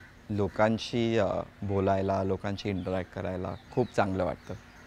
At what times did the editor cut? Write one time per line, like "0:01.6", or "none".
0:03.6